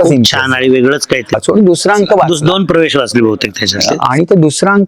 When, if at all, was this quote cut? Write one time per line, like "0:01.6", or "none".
0:01.4